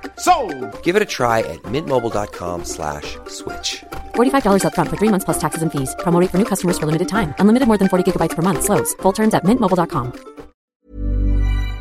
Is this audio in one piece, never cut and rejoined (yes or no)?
no